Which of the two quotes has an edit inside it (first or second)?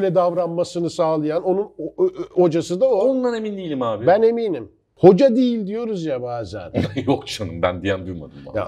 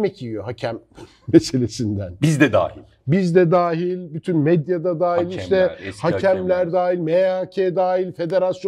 first